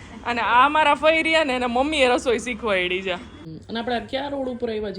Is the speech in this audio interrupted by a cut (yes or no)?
yes